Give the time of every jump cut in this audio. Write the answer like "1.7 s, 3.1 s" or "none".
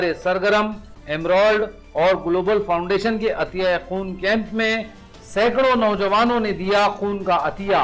none